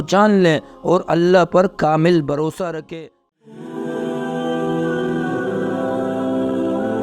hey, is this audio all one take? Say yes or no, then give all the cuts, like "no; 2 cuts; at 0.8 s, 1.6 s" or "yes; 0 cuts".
no; 1 cut; at 2.9 s